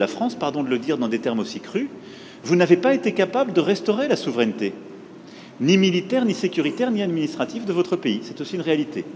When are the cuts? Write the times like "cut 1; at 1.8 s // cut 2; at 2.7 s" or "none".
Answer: none